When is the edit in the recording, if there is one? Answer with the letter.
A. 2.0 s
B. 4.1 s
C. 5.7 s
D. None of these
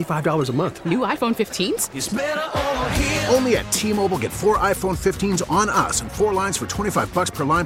D